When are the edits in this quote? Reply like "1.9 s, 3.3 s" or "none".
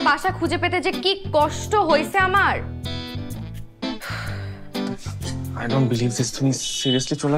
2.6 s, 5.6 s